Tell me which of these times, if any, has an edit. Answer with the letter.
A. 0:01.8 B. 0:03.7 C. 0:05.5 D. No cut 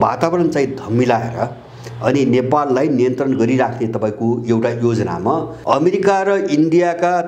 C